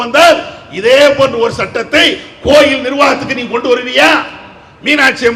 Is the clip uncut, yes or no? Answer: yes